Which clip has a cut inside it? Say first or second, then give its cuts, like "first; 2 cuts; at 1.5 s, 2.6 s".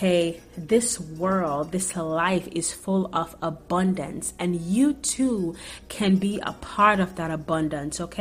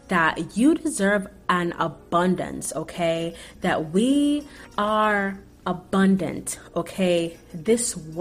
second; 1 cut; at 4.6 s